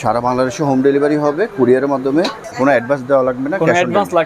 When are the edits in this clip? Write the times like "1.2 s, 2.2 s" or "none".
2.4 s